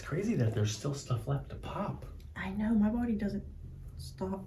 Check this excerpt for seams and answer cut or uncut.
uncut